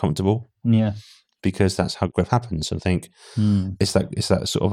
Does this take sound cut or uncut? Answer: cut